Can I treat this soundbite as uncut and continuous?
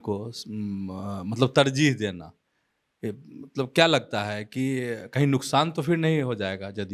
yes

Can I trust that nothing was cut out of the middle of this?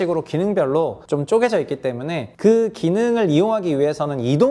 no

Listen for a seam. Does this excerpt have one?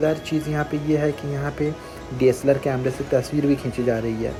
no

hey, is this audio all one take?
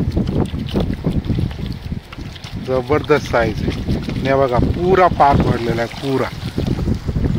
yes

